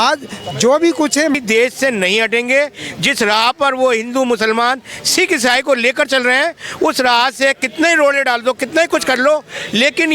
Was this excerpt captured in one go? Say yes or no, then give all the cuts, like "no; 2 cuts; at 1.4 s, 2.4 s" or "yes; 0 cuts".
no; 1 cut; at 1.3 s